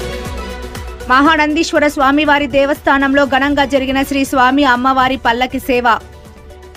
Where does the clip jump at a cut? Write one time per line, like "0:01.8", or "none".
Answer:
0:01.0